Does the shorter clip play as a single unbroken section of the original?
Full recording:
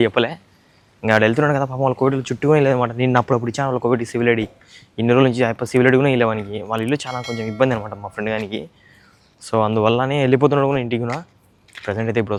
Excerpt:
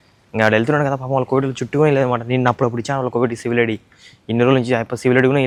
yes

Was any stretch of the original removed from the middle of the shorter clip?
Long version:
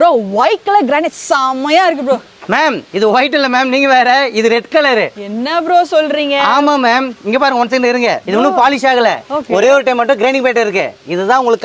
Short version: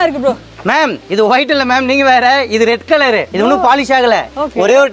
yes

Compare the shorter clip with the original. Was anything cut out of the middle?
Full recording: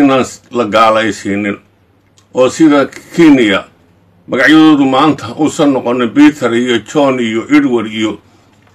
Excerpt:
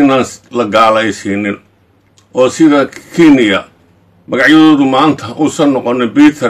no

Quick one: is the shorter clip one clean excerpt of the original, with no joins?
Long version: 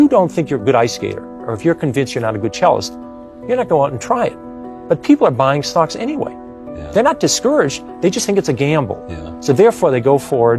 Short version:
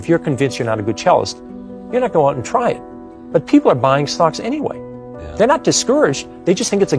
yes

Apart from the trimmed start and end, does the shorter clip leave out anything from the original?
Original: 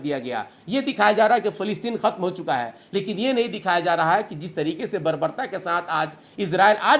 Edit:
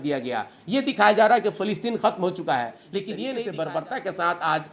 yes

